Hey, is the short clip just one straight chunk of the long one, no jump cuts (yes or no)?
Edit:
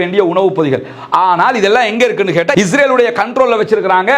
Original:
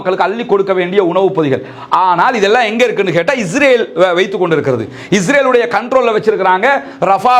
no